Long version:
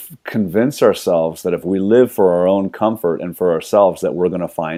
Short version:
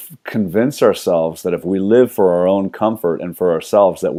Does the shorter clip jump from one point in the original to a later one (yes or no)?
no